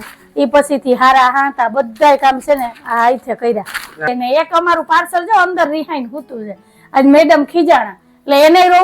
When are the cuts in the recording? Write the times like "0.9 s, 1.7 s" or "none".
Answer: 4.1 s

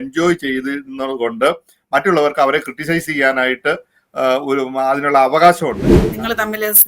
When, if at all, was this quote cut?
6.0 s

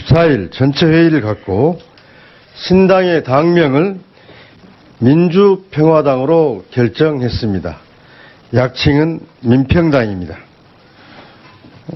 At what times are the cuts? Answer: 5.0 s

